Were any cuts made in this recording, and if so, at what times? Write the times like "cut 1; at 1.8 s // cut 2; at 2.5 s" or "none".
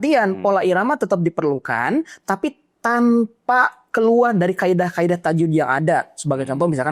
none